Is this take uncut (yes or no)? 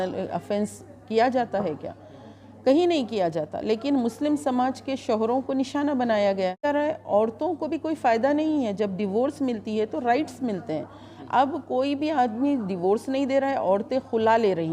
no